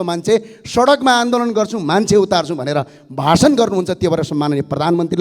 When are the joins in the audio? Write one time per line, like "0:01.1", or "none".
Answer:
none

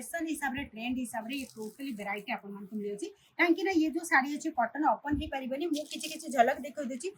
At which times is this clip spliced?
none

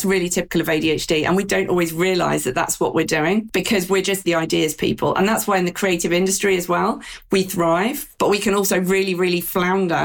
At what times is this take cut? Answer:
0:01.5
0:04.0
0:08.0

